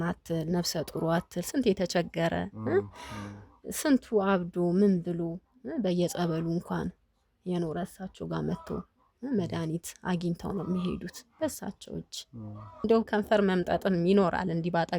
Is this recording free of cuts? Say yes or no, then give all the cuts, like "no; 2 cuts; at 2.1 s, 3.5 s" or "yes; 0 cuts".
no; 1 cut; at 12.9 s